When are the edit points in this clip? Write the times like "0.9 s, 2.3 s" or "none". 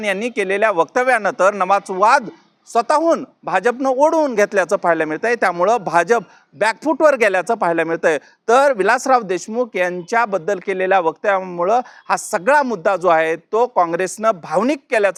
none